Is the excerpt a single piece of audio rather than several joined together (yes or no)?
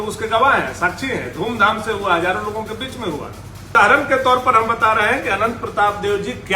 no